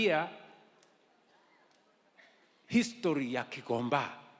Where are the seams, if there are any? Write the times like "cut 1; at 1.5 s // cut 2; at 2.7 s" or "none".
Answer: none